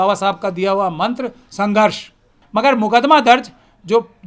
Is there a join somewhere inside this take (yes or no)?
yes